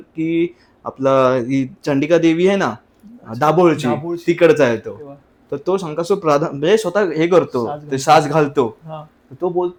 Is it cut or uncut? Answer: uncut